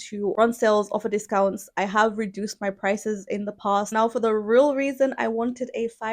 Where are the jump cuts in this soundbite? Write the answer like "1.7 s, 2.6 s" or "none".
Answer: 3.9 s